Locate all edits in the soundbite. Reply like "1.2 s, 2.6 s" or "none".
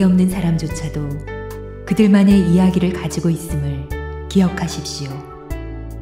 4.8 s